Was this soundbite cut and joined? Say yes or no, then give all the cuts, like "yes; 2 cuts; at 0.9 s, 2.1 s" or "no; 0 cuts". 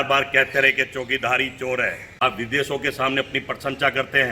yes; 1 cut; at 2.0 s